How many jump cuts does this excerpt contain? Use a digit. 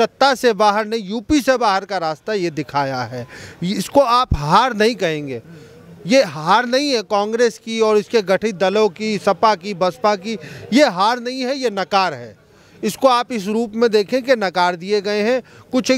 0